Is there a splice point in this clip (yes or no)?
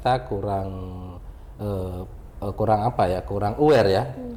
no